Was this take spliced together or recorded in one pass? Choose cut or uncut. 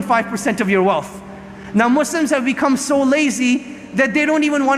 uncut